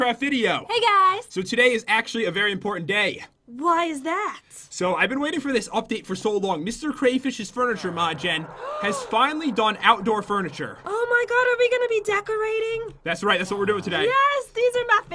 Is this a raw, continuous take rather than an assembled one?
yes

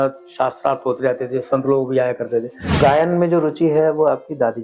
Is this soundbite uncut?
no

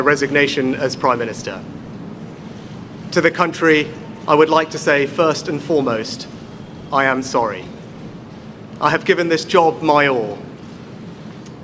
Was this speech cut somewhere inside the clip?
yes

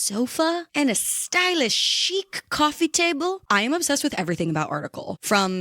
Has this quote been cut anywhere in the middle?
yes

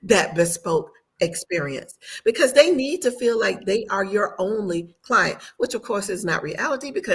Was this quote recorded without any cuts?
yes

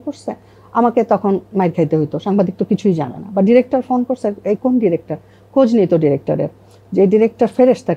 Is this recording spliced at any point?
no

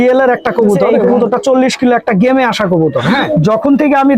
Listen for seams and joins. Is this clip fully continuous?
no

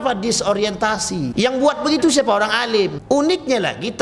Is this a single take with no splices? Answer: no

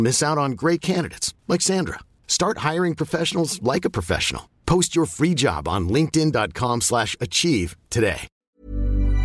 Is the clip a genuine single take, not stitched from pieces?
no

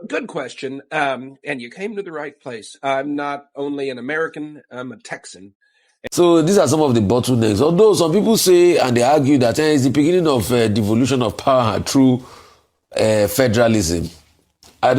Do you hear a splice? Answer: yes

